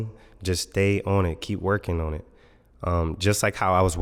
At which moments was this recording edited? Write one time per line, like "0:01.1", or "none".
none